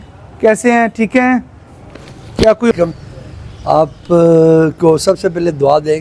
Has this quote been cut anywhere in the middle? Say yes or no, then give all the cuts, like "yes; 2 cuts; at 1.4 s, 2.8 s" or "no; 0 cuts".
yes; 1 cut; at 2.7 s